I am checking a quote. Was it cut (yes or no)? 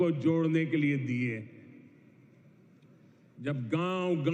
no